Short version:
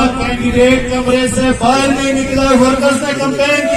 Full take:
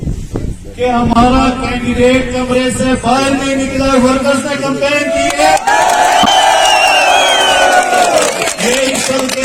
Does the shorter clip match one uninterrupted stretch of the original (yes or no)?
yes